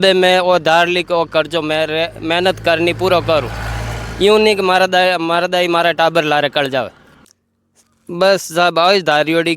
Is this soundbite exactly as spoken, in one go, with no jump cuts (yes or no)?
no